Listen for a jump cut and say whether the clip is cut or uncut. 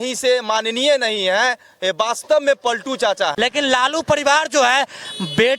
cut